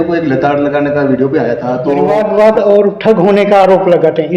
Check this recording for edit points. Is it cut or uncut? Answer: cut